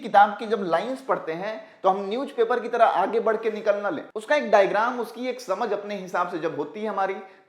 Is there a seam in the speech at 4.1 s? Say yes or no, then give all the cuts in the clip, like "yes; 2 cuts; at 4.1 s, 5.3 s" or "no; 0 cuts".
yes; 1 cut; at 4.1 s